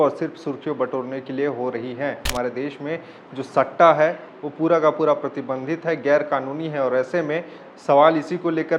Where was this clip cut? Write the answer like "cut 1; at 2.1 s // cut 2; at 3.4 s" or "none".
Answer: cut 1; at 2.3 s